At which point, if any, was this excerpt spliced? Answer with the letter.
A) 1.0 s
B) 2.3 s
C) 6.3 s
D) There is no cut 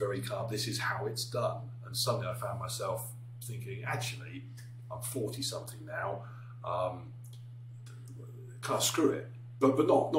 D